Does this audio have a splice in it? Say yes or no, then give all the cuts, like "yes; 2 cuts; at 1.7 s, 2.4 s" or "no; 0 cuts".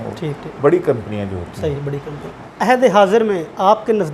no; 0 cuts